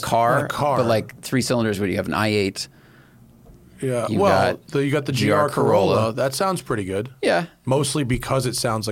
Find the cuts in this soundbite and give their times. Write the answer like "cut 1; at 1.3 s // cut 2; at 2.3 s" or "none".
none